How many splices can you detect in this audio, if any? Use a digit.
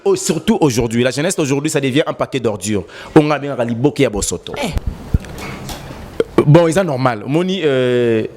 1